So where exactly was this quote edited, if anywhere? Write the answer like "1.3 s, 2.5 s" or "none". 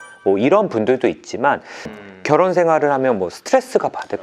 1.8 s